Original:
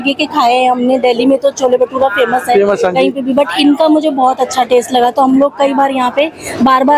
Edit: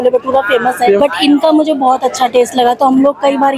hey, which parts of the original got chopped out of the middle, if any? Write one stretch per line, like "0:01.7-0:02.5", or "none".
0:02.7-0:03.4